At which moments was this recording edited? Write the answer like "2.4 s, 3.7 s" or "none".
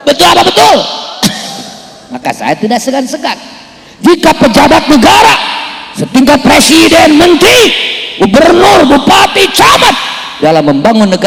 none